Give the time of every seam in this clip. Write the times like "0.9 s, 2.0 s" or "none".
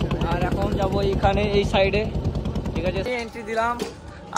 3.0 s